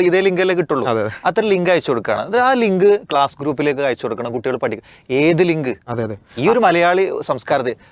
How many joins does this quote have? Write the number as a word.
zero